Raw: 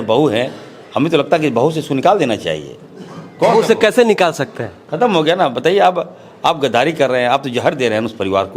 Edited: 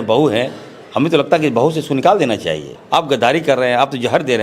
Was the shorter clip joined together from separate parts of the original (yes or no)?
yes